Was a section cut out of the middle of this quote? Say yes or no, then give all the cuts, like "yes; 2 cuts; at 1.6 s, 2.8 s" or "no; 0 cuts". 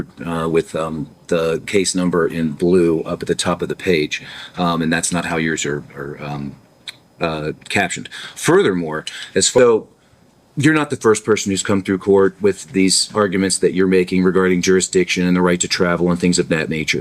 yes; 1 cut; at 9.6 s